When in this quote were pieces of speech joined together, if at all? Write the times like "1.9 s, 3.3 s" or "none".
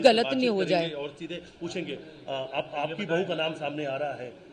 none